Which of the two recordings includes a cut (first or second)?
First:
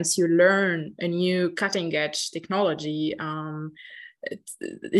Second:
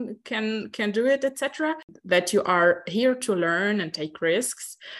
second